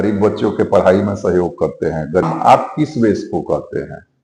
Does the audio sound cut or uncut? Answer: cut